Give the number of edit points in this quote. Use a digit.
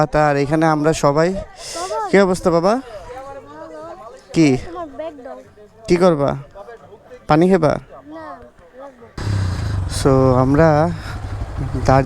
1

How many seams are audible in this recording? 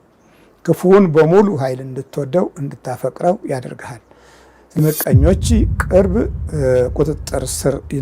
1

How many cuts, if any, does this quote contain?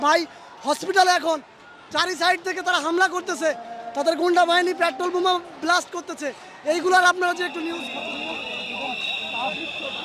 0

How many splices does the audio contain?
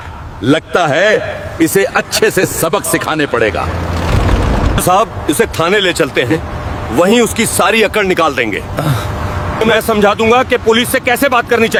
0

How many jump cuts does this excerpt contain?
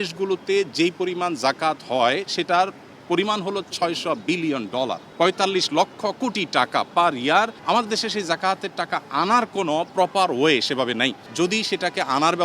3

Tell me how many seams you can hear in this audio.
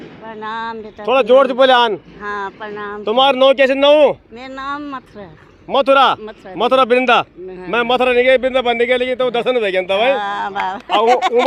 0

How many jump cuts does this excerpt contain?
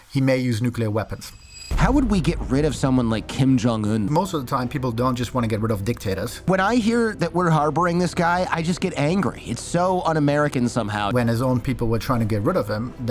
4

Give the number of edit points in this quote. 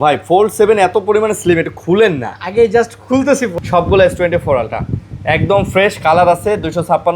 1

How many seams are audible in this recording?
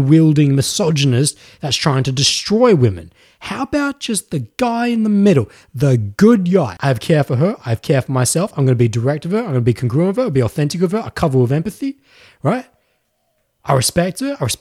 1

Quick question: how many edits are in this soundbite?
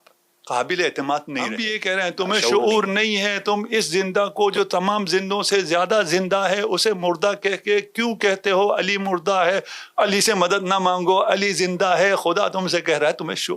1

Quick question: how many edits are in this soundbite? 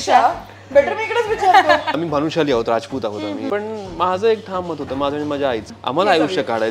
3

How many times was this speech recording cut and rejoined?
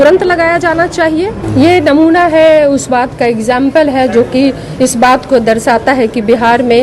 1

